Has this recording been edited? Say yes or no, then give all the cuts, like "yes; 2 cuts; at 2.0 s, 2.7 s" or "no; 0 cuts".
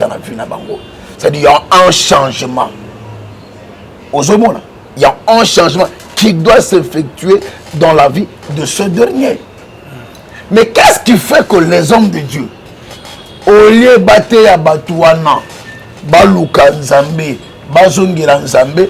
no; 0 cuts